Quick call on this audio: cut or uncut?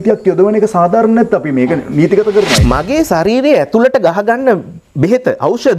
cut